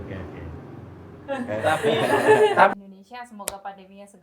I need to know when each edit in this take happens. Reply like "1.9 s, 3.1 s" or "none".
2.8 s